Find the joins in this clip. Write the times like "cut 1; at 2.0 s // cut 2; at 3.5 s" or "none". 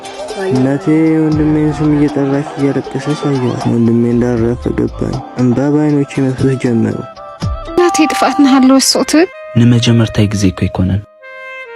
cut 1; at 7.8 s